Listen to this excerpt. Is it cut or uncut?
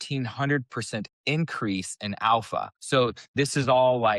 cut